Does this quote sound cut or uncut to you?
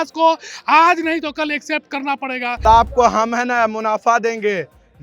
cut